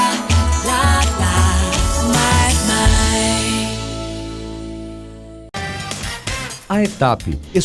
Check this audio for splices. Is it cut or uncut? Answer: cut